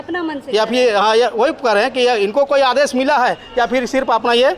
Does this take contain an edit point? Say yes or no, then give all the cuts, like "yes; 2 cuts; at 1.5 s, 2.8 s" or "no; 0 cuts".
no; 0 cuts